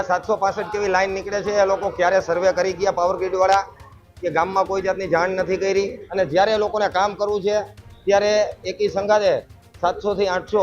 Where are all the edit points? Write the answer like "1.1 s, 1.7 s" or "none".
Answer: 6.0 s